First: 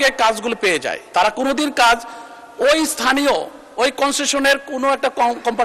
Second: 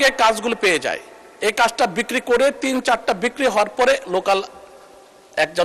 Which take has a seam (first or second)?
first